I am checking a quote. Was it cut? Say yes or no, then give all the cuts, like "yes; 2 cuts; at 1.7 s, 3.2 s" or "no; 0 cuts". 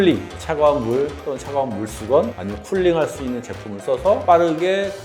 no; 0 cuts